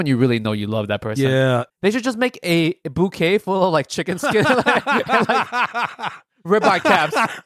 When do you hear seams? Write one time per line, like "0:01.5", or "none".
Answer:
0:01.7